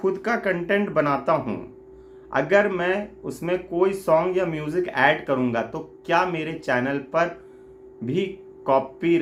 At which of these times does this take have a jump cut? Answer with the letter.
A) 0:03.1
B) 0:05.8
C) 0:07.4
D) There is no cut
D